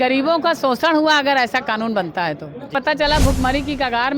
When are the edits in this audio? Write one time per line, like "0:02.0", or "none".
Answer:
0:02.6